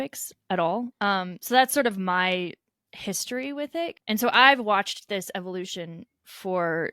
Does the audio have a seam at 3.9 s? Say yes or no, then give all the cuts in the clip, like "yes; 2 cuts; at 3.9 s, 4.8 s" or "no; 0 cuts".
yes; 2 cuts; at 0.9 s, 3.9 s